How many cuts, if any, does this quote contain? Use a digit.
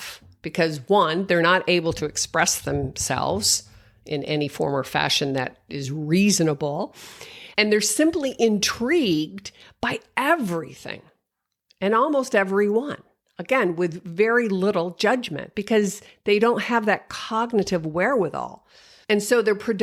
0